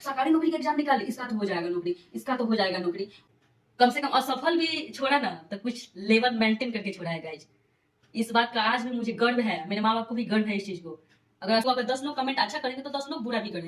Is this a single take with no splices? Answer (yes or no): no